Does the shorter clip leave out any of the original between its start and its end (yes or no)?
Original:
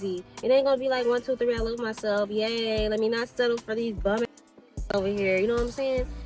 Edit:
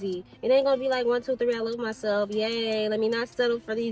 no